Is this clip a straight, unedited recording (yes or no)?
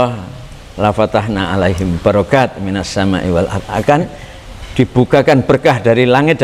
yes